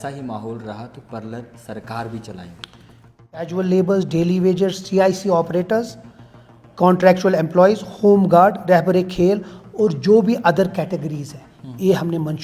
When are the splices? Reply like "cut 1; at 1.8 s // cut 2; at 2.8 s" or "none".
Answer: cut 1; at 3.5 s